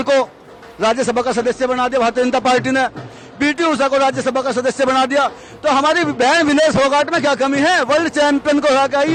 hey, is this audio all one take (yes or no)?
yes